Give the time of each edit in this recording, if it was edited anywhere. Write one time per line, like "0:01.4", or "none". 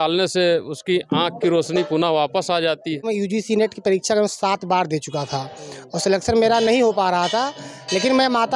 0:03.1